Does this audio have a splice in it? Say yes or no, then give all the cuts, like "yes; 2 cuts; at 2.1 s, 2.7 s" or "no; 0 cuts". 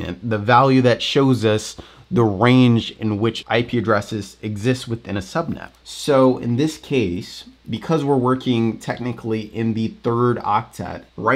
yes; 1 cut; at 3.4 s